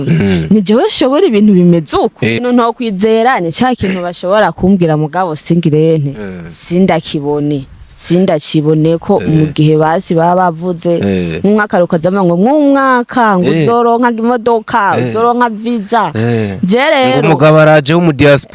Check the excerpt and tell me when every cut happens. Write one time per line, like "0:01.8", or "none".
0:02.4